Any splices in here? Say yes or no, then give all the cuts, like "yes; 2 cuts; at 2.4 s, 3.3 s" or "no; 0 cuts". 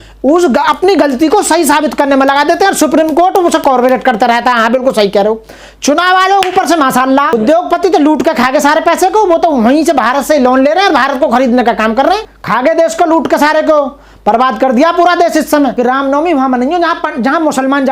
yes; 3 cuts; at 7.3 s, 12.4 s, 15.7 s